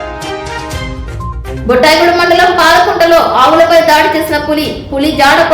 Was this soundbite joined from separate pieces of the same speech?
yes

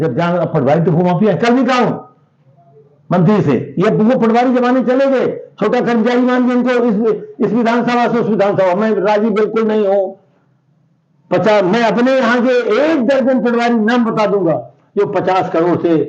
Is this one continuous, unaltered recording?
yes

